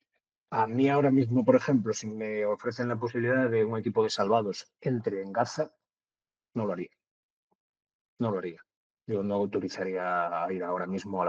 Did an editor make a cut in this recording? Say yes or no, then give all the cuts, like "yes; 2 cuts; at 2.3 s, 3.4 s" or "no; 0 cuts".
no; 0 cuts